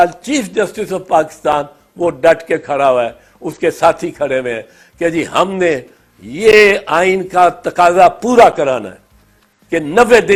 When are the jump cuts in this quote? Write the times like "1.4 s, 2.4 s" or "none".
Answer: none